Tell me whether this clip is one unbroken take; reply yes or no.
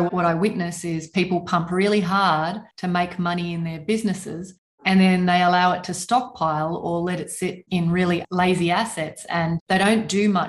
no